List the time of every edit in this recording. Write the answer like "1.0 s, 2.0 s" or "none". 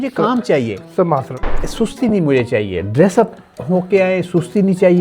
1.5 s